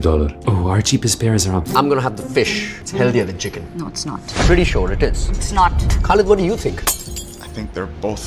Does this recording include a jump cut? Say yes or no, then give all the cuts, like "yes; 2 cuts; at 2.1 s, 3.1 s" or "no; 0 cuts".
yes; 1 cut; at 1.7 s